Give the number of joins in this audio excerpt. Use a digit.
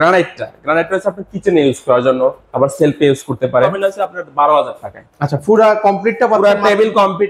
1